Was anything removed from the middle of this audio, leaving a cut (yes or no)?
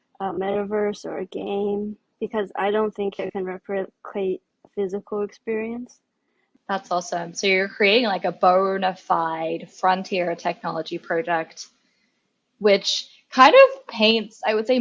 yes